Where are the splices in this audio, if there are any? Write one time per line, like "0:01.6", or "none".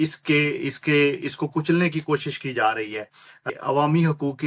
0:03.5